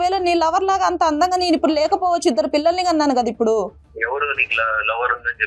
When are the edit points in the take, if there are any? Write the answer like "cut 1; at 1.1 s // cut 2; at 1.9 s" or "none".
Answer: cut 1; at 3.9 s

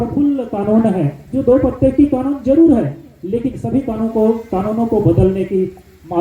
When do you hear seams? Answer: none

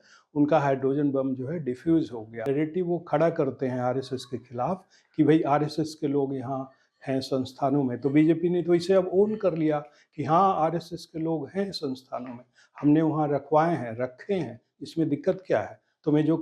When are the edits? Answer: cut 1; at 2.3 s

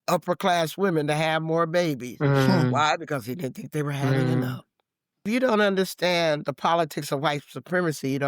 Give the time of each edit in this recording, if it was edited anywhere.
cut 1; at 5.1 s

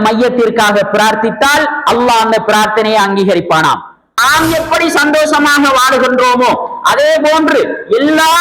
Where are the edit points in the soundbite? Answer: cut 1; at 4.2 s

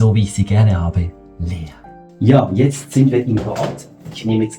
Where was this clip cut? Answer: cut 1; at 2.0 s

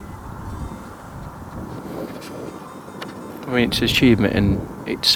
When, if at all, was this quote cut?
none

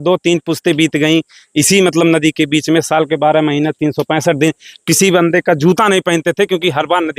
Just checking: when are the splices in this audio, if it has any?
none

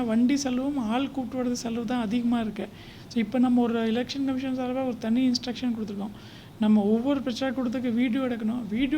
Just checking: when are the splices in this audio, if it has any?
none

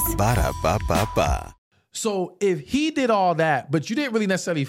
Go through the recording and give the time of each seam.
cut 1; at 1.5 s

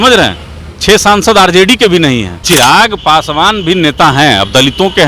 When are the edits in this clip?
cut 1; at 2.4 s

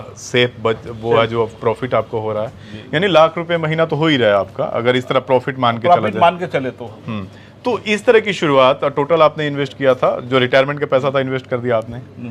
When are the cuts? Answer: none

